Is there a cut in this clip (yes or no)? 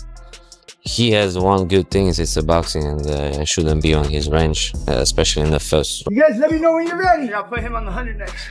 yes